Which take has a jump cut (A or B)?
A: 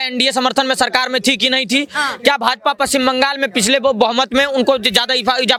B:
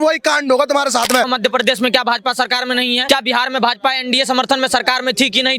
B